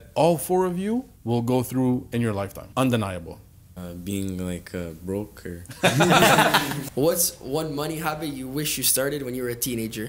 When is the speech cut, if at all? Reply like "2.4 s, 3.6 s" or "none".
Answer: 1.1 s, 2.6 s, 3.6 s, 6.7 s